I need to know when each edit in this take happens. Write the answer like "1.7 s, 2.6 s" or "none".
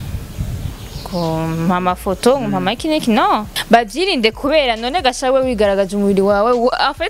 3.5 s